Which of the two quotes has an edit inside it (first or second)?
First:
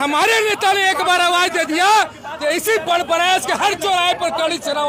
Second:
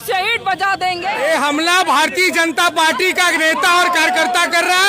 second